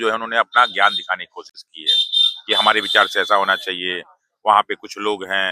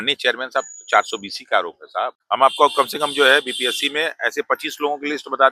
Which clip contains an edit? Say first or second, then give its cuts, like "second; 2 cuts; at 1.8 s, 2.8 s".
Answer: second; 1 cut; at 2.2 s